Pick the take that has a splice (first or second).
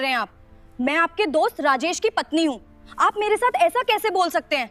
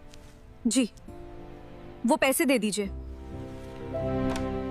second